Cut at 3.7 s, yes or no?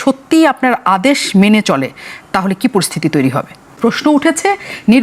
yes